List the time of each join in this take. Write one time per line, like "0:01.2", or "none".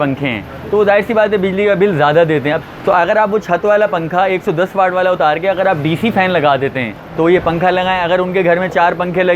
0:02.7
0:07.0

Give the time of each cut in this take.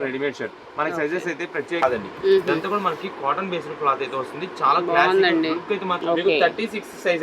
0:01.8
0:06.0

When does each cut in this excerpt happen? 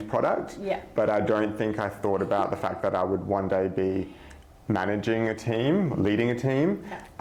none

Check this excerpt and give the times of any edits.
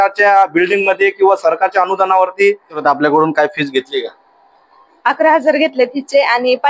0:02.8

